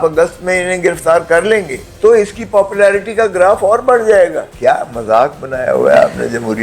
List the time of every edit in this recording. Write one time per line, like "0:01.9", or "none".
0:01.8
0:04.5